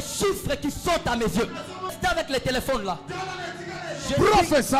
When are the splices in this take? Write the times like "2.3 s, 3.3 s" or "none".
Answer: 2.0 s